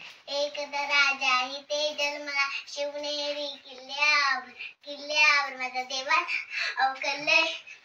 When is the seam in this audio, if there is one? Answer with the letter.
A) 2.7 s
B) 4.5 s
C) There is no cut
C